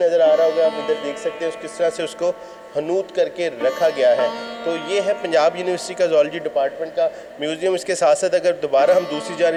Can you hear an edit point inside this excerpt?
no; 0 cuts

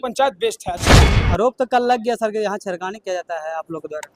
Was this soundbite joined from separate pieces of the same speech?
yes; 1 cut; at 1.1 s

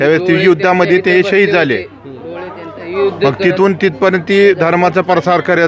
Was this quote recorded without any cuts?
yes; 0 cuts

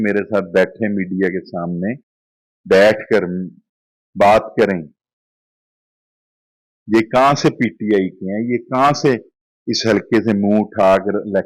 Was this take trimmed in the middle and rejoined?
no; 0 cuts

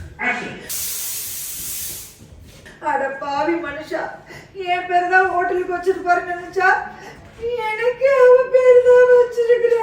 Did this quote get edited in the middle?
no; 0 cuts

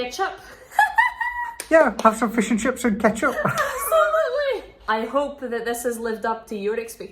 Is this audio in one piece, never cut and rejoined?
no; 1 cut; at 4.8 s

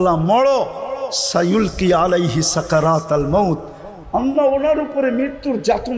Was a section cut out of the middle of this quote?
no; 0 cuts

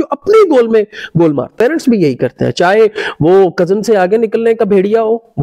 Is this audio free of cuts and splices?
no; 1 cut; at 1.5 s

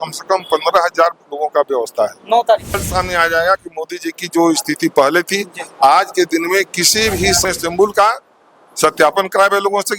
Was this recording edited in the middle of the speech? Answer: yes; 2 cuts; at 2.8 s, 7.4 s

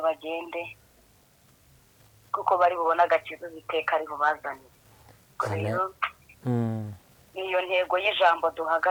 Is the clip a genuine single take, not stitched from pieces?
yes; 0 cuts

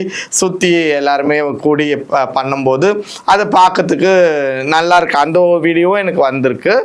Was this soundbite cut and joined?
no; 0 cuts

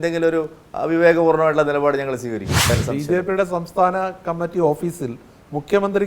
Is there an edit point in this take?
yes; 1 cut; at 2.7 s

